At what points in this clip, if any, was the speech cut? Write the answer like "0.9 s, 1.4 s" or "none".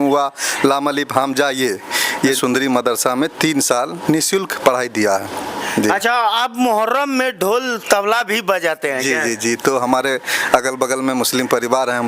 2.4 s, 5.6 s